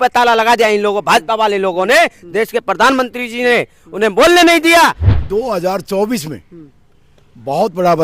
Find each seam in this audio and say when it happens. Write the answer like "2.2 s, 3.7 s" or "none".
5.1 s